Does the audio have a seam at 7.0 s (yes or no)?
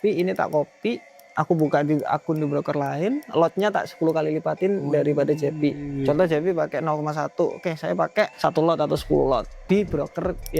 no